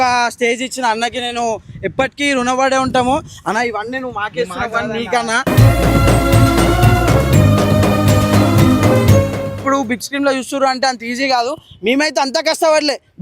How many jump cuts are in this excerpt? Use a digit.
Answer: 1